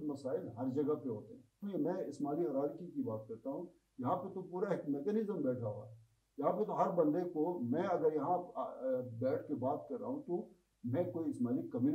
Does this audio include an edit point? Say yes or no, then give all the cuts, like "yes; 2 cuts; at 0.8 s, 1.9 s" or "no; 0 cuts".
yes; 1 cut; at 1.6 s